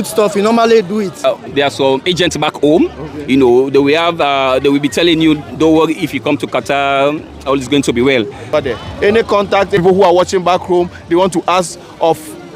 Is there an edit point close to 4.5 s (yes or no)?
no